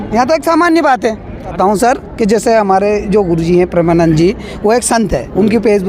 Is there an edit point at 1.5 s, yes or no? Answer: yes